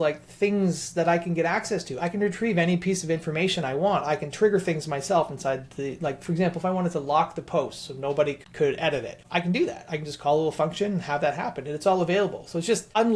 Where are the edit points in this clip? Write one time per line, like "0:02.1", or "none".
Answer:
none